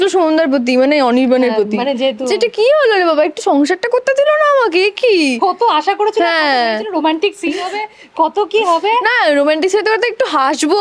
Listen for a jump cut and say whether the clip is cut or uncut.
uncut